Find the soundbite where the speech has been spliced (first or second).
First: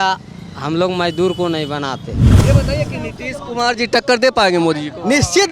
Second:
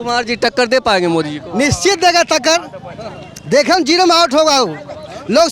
first